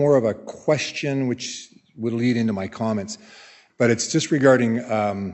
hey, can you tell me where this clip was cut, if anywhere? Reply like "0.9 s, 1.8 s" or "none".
3.6 s